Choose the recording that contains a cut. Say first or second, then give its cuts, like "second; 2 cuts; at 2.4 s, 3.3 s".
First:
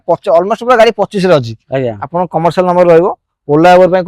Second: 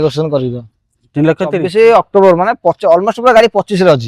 second; 1 cut; at 1.6 s